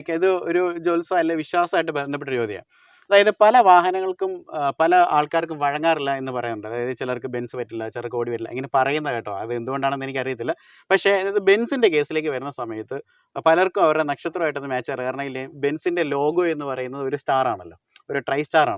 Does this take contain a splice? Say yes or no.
no